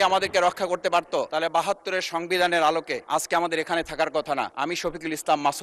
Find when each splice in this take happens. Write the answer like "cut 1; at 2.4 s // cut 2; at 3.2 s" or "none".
cut 1; at 1.3 s // cut 2; at 3.0 s // cut 3; at 4.5 s